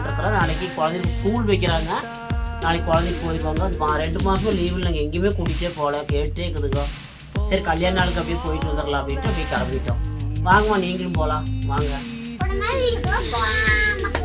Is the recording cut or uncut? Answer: uncut